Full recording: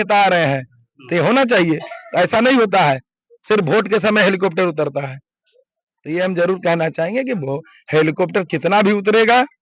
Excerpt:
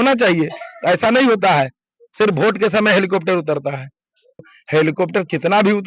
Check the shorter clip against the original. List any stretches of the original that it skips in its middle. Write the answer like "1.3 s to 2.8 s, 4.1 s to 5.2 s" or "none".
5.8 s to 7.7 s